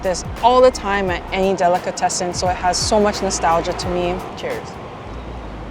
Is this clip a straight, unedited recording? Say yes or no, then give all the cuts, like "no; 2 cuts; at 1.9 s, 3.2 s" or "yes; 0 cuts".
yes; 0 cuts